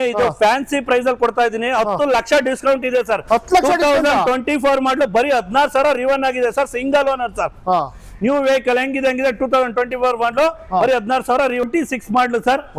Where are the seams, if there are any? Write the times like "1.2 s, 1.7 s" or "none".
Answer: 11.7 s